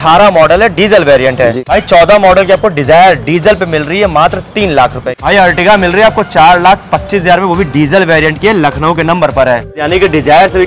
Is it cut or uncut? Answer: cut